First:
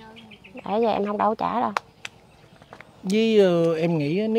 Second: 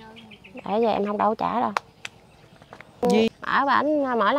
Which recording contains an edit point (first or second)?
second